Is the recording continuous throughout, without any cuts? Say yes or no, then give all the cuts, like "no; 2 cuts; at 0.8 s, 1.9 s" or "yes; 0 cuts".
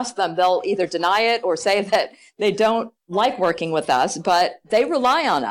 yes; 0 cuts